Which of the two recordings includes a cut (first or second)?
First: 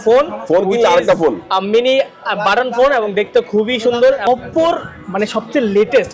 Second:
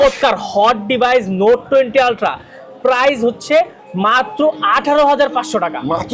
first